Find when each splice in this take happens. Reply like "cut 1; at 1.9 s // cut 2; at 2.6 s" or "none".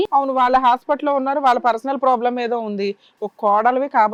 none

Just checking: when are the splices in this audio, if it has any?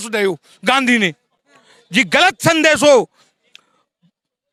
none

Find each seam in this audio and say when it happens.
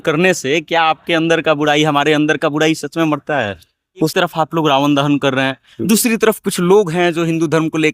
cut 1; at 4.1 s

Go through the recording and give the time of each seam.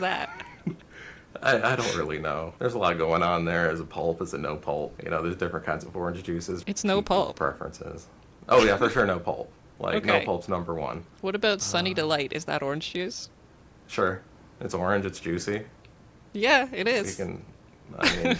cut 1; at 2.5 s // cut 2; at 5.0 s // cut 3; at 6.6 s // cut 4; at 11.1 s

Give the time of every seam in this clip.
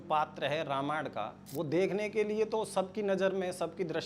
cut 1; at 1.4 s

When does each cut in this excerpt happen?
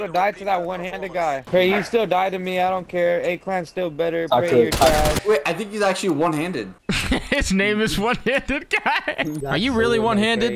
cut 1; at 1.4 s // cut 2; at 5.2 s // cut 3; at 9.4 s

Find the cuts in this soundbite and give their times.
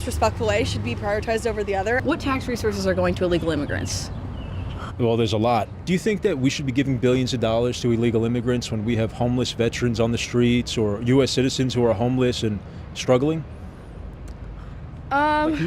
cut 1; at 2.0 s // cut 2; at 5.8 s

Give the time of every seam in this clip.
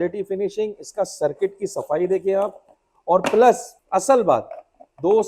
cut 1; at 3.7 s

